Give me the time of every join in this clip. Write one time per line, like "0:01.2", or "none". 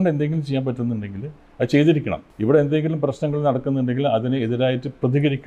0:02.2